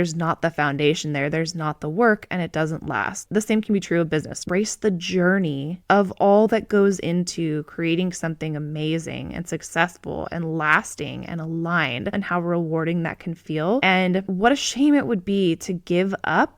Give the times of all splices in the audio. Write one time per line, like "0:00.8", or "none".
0:04.5
0:12.1
0:14.0